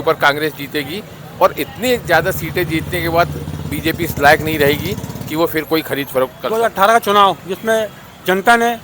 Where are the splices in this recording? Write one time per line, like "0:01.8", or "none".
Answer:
0:06.4